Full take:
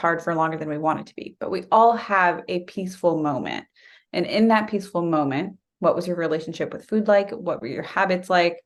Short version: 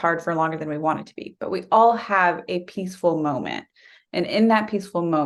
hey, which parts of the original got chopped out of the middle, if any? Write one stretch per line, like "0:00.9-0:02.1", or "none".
none